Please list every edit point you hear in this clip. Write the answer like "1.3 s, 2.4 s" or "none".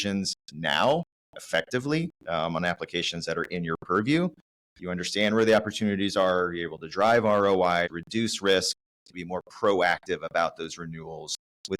8.0 s, 9.1 s